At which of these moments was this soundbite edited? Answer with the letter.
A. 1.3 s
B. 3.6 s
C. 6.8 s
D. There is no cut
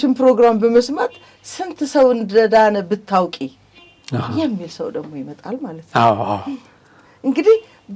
D